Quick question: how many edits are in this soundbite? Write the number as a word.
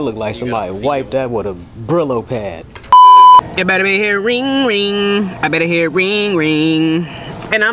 two